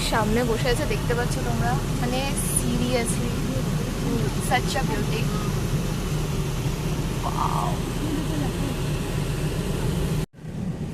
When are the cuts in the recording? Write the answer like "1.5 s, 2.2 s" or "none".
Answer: none